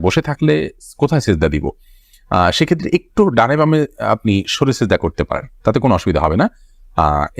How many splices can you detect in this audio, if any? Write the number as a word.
zero